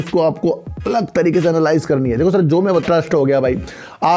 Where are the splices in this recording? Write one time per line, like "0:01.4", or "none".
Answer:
0:02.7